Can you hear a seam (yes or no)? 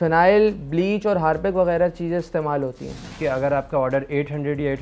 yes